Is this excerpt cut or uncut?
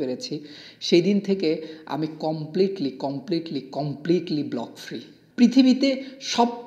cut